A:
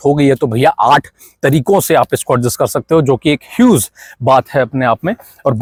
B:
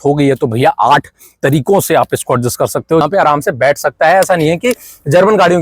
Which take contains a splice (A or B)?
B